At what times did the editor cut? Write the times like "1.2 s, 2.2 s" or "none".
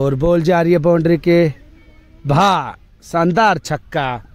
none